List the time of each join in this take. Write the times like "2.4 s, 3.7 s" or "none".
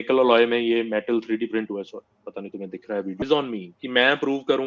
3.2 s